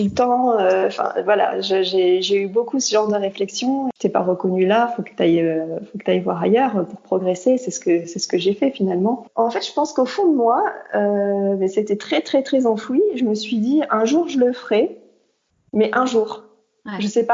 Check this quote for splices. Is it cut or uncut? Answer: cut